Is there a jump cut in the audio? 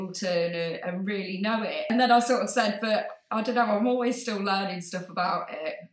yes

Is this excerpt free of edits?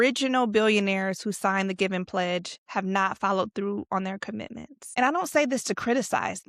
no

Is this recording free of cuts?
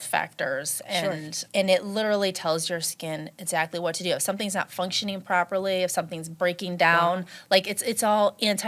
no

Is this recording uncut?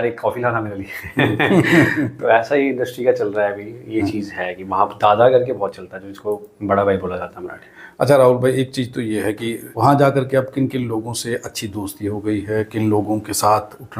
yes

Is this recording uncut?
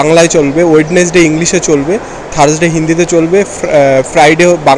yes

